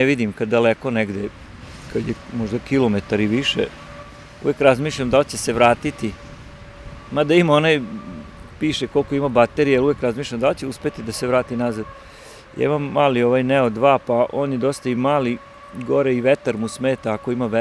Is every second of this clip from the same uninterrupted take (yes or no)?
yes